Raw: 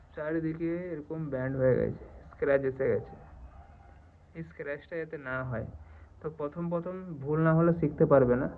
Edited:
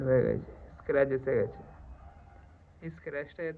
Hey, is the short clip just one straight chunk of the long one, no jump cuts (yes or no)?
yes